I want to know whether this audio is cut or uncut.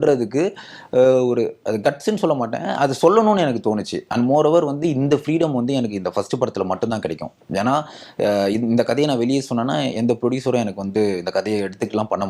uncut